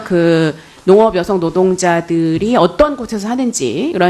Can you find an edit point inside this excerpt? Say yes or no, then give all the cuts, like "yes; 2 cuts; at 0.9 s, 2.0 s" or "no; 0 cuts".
yes; 1 cut; at 1.5 s